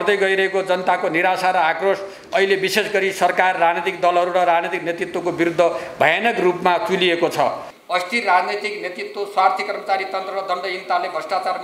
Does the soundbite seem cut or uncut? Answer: cut